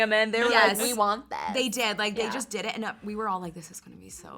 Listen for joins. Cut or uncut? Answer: uncut